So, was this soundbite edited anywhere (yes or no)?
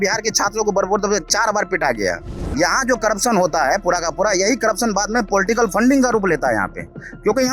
yes